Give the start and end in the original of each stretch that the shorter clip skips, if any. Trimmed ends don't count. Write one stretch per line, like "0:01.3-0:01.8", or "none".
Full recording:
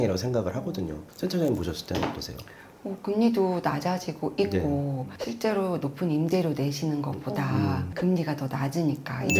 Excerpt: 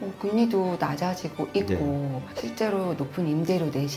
none

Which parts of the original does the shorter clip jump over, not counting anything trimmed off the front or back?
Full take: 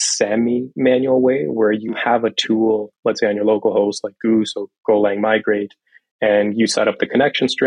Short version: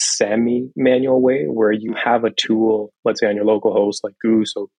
none

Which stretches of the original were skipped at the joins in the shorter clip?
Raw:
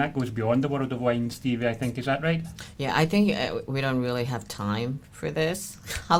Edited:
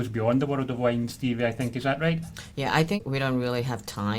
0:03.2-0:03.6

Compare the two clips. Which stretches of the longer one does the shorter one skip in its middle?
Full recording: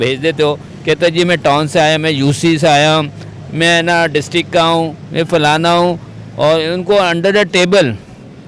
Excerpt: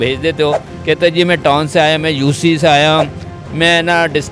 none

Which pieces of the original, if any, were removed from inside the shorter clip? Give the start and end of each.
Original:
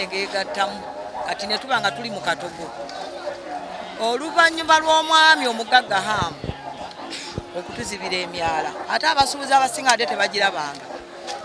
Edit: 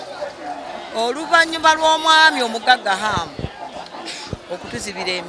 none

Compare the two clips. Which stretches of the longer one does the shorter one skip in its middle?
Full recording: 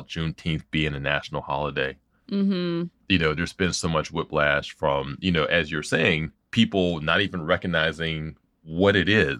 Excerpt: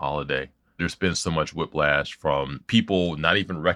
0:02.3-0:03.4
0:05.1-0:06.4

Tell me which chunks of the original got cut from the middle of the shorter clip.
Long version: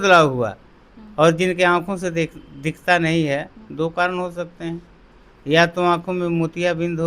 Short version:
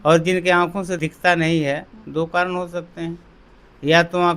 0:02.1-0:02.6

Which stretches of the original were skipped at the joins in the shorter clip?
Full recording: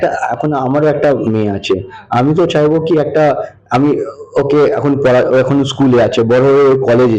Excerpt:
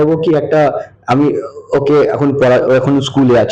none

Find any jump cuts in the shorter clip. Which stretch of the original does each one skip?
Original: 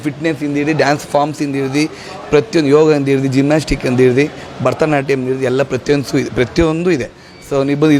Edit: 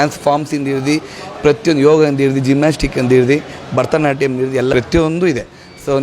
0:05.6-0:06.4

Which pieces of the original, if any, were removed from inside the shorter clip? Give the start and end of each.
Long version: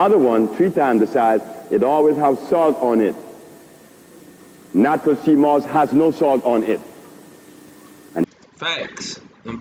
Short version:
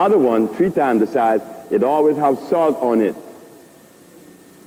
none

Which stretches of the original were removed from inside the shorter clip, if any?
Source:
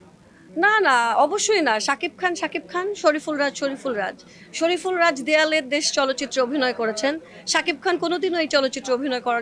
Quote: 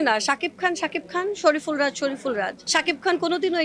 0:04.2-0:07.4

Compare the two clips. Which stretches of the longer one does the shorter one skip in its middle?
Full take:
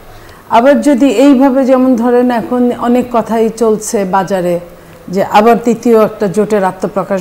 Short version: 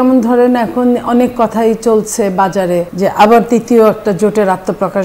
0:04.7-0:05.1

